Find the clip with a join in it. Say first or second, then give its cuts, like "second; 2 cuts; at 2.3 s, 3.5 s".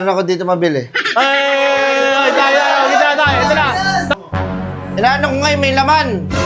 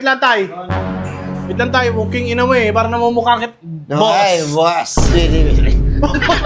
first; 1 cut; at 4.2 s